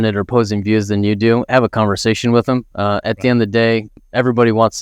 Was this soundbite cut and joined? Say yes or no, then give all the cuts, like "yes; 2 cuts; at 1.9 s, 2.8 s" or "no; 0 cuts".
no; 0 cuts